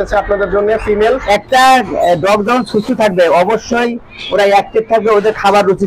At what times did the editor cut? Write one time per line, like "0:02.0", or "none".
0:01.2